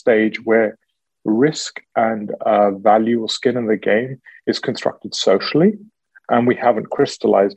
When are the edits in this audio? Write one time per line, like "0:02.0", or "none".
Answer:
none